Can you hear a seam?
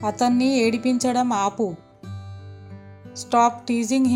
no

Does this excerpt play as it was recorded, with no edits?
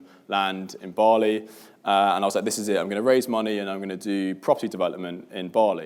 yes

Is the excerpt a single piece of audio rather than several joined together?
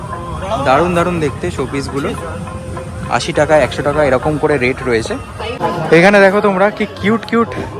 no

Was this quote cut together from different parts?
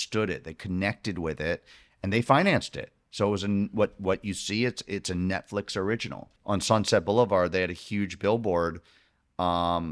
yes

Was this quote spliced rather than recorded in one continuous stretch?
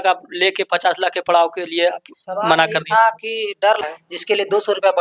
yes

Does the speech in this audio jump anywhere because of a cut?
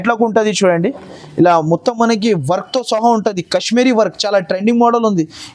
no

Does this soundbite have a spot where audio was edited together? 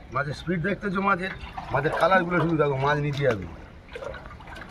no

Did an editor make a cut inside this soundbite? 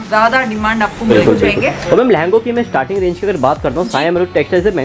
yes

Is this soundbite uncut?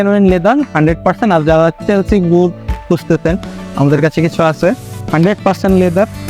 yes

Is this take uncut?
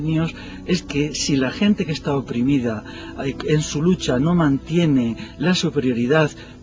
no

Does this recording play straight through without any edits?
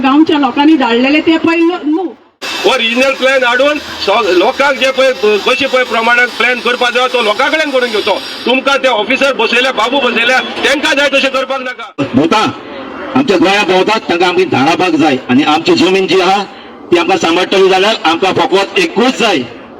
no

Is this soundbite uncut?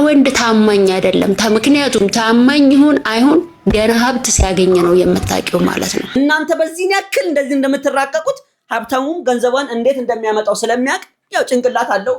no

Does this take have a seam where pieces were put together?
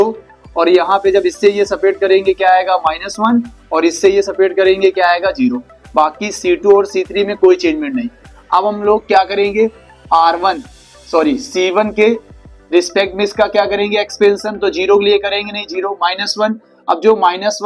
no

